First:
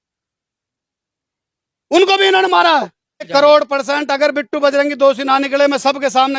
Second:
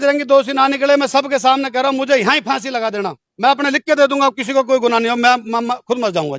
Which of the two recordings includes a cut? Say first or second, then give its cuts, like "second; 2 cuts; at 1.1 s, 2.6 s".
first; 1 cut; at 3.3 s